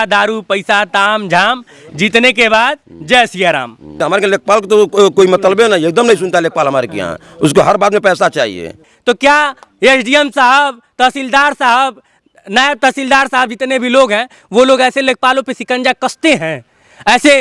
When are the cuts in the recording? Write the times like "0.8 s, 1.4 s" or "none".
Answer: 4.0 s, 8.9 s